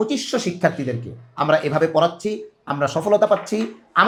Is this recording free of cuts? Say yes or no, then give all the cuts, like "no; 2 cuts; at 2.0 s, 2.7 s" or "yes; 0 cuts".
yes; 0 cuts